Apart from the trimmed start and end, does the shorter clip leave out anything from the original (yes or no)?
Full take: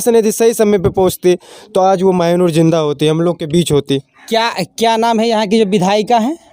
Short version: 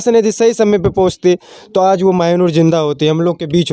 no